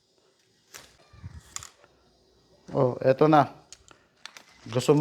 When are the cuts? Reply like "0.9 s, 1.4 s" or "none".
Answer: 1.0 s